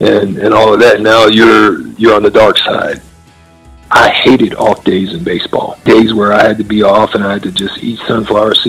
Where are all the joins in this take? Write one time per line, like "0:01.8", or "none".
0:03.2
0:05.7